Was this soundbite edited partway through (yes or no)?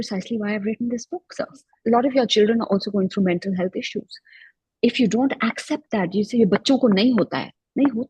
yes